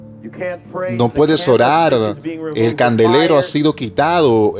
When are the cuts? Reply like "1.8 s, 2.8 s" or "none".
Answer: 0.9 s